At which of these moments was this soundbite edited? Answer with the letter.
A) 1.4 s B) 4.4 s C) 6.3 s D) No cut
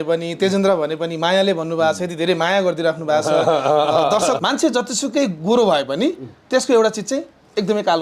B